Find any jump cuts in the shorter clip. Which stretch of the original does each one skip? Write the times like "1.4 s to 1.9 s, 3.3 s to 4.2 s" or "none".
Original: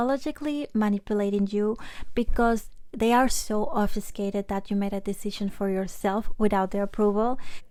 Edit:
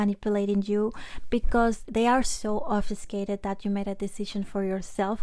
2.7 s to 2.9 s

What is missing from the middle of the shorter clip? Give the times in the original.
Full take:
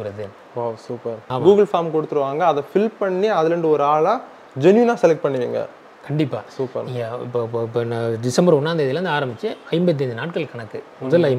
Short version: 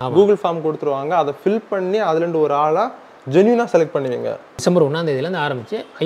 5.8 s to 8.3 s

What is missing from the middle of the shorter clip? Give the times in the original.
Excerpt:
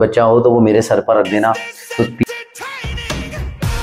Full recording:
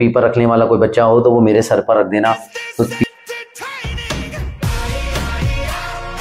3.1 s to 3.3 s

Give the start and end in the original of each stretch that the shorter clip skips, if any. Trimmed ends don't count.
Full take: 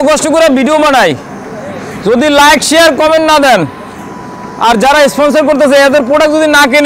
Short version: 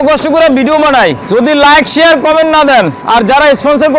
1.2 s to 2.0 s, 3.7 s to 4.5 s

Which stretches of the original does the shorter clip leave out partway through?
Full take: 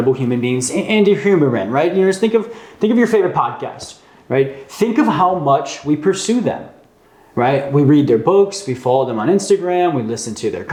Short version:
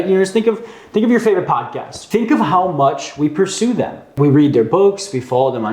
3.8 s to 4.6 s, 6.8 s to 7.7 s

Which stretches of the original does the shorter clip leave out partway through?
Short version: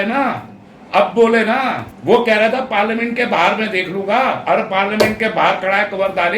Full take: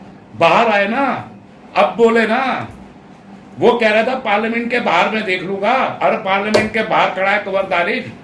2.7 s to 3.4 s

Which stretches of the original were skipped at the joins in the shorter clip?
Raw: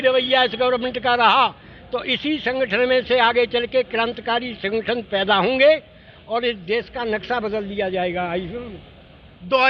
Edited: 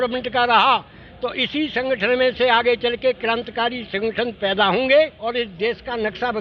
5.9 s to 6.2 s

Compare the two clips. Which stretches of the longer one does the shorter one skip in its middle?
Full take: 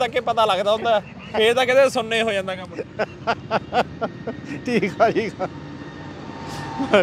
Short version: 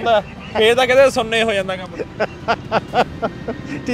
none

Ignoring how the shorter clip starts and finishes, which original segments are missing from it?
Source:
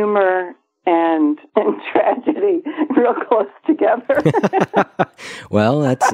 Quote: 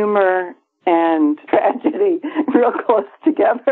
1.4 s to 1.8 s

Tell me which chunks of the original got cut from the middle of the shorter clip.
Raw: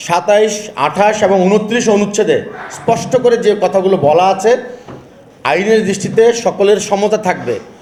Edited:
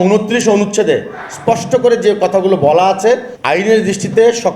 4.7 s to 5.3 s

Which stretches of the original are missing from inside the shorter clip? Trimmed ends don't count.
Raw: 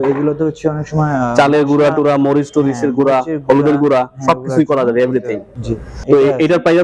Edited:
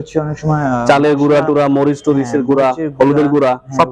none

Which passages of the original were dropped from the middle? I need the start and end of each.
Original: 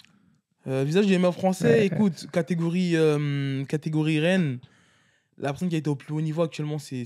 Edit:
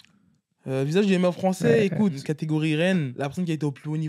2.2 s to 3.7 s, 4.6 s to 5.3 s

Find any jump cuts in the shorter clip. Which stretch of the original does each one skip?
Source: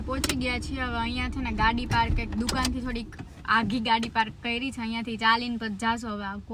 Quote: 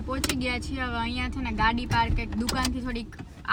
none

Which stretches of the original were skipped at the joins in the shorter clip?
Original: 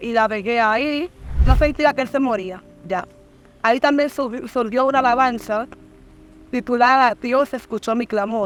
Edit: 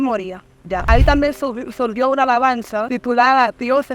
3.0 s to 3.6 s, 5.6 s to 6.5 s

